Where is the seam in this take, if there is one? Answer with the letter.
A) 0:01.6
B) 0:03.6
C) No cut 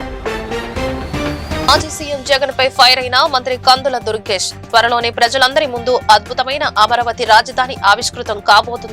A